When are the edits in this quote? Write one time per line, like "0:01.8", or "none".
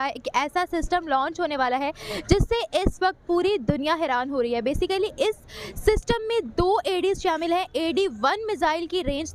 none